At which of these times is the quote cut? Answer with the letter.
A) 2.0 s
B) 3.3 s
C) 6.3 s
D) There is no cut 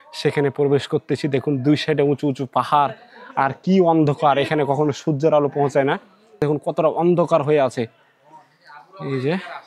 C